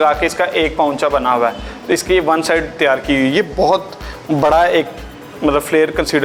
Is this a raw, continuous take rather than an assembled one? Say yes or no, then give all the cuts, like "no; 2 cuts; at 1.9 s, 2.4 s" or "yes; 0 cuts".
yes; 0 cuts